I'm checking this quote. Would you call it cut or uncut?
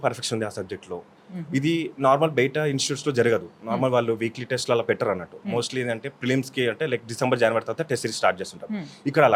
uncut